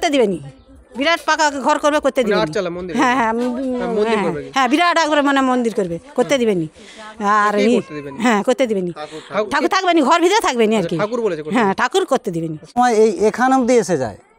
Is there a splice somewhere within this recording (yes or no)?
yes